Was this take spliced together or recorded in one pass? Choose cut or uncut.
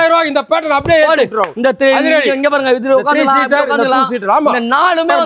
uncut